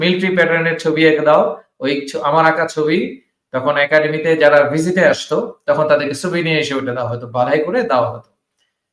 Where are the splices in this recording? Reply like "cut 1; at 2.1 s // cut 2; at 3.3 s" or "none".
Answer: none

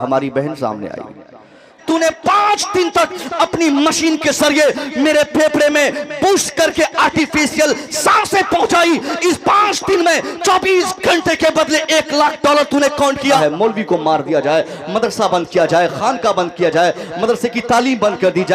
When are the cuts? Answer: cut 1; at 1.8 s // cut 2; at 13.4 s

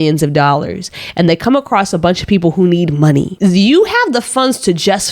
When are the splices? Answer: cut 1; at 3.3 s

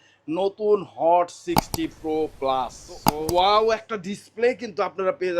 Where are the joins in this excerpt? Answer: cut 1; at 3.0 s

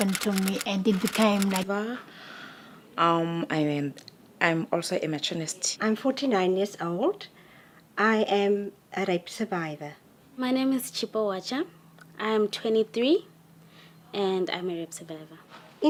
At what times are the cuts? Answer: none

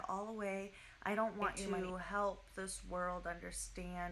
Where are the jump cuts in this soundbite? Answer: cut 1; at 1.6 s

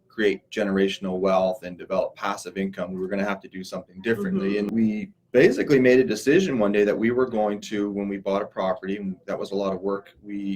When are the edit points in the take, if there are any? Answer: cut 1; at 4.7 s

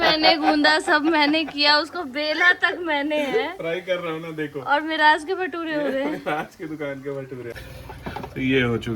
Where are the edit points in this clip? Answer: cut 1; at 7.6 s

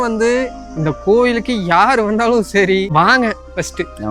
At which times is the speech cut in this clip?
cut 1; at 2.9 s

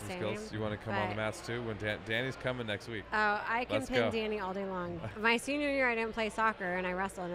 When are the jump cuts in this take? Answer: cut 1; at 5.0 s

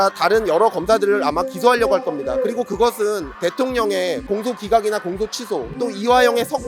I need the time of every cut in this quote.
cut 1; at 3.3 s // cut 2; at 4.2 s

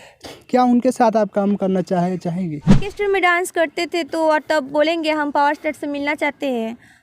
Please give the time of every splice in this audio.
cut 1; at 2.9 s

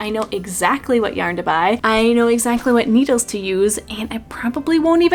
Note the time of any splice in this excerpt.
none

